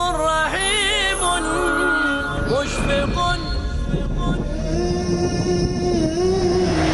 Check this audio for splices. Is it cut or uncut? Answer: cut